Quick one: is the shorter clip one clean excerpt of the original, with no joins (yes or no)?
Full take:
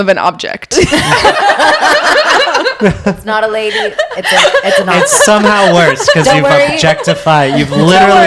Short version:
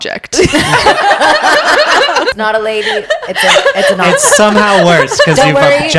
no